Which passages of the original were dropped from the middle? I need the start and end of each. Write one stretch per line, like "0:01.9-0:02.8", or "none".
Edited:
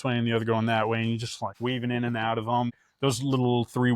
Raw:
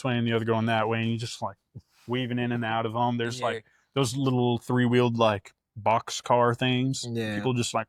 0:01.4-0:01.9
0:03.2-0:03.6